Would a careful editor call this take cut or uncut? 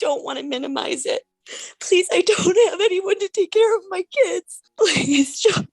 cut